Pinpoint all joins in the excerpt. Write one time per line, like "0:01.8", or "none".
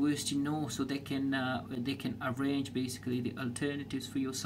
none